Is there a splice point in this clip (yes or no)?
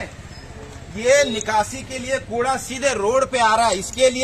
no